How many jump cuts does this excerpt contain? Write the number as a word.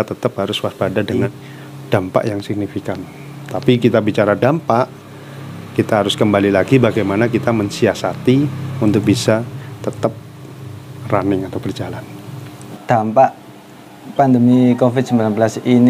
two